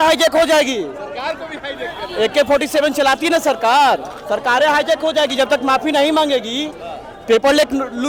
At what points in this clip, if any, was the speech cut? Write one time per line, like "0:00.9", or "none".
none